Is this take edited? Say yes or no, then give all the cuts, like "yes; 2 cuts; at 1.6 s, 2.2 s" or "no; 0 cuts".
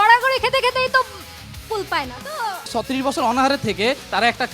yes; 1 cut; at 2.7 s